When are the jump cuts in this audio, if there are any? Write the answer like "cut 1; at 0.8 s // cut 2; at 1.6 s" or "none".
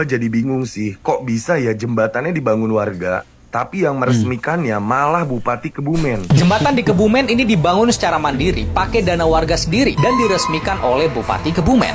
cut 1; at 6.2 s